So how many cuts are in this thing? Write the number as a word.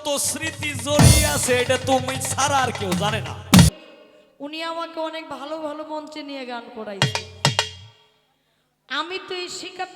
one